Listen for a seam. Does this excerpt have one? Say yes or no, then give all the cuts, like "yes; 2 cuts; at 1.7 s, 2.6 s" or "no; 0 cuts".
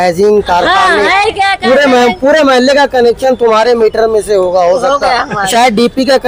no; 0 cuts